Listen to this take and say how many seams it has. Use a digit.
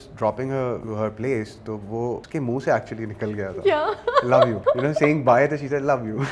3